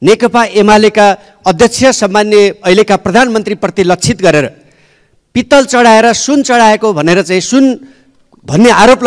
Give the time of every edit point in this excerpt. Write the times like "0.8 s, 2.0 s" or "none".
none